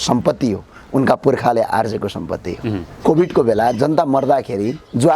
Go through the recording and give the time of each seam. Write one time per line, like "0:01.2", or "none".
0:03.0